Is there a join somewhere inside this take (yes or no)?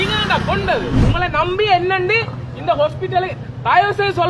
yes